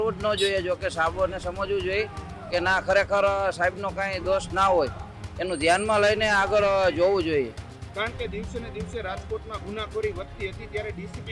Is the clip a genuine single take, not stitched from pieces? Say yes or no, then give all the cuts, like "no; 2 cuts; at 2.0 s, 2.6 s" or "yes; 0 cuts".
yes; 0 cuts